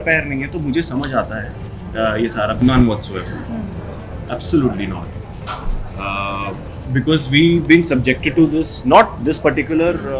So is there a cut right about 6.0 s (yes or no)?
no